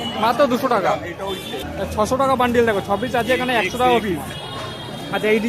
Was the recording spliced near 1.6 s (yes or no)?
yes